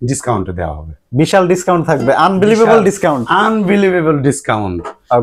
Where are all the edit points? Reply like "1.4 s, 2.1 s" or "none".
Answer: none